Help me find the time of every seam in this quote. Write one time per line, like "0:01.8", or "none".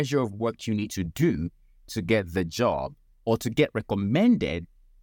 none